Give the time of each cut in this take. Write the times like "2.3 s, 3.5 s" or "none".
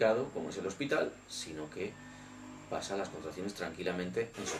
2.0 s